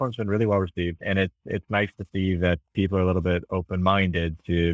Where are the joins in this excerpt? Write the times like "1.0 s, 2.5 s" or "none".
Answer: 1.0 s, 2.6 s